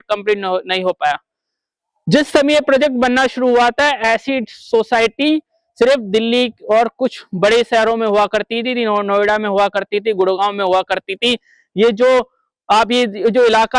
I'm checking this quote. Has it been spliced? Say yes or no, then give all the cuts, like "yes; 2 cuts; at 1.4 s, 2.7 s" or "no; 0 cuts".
no; 0 cuts